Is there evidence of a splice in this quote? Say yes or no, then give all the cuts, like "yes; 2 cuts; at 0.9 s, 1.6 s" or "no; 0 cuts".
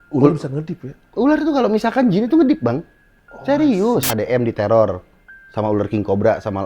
yes; 1 cut; at 4.1 s